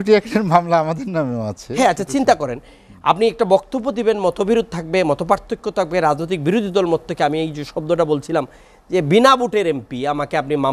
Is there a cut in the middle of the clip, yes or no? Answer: no